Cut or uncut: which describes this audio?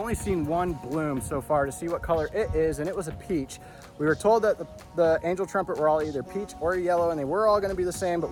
uncut